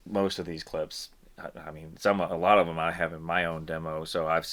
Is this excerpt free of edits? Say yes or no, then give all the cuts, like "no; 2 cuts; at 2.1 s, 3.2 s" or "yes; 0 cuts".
yes; 0 cuts